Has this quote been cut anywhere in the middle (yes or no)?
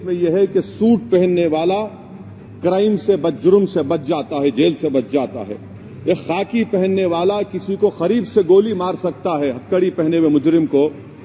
no